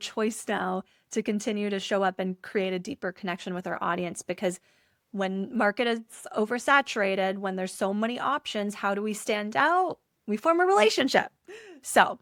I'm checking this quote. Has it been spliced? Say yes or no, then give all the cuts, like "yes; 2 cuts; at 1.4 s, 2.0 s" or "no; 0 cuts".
no; 0 cuts